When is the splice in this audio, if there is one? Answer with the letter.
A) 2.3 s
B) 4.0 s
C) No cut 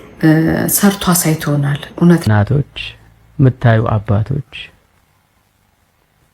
A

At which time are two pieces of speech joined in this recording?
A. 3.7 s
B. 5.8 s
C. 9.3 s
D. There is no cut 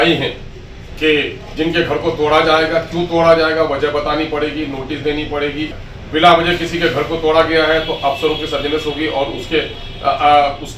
B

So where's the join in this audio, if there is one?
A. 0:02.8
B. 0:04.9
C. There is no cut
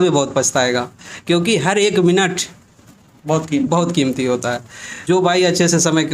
B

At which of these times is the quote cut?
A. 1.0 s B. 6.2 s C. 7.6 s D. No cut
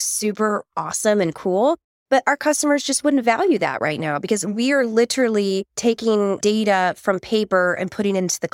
B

